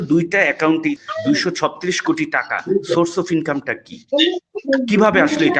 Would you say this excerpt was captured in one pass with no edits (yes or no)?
no